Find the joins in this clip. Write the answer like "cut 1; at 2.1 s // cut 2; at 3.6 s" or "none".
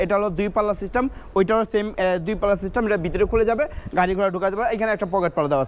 none